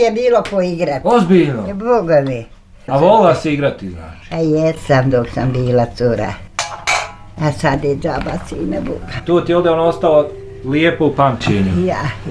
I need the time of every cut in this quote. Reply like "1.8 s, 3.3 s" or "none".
2.9 s